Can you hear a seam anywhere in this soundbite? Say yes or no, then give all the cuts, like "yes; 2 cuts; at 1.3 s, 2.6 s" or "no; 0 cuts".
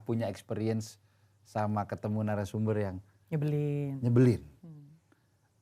no; 0 cuts